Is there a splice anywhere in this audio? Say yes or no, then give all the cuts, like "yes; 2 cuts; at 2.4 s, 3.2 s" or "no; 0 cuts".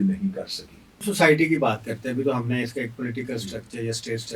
yes; 1 cut; at 1.0 s